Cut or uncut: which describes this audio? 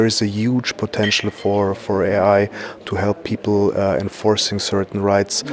uncut